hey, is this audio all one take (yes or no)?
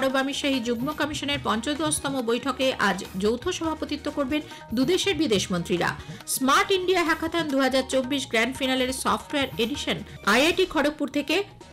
no